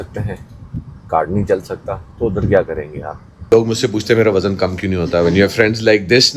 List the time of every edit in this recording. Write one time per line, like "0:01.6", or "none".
0:03.5